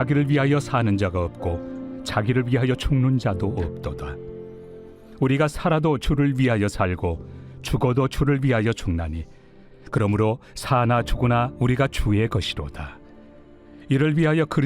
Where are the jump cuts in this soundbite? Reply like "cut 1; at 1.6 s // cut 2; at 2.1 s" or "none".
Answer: cut 1; at 13.1 s